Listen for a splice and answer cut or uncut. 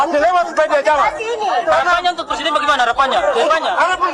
uncut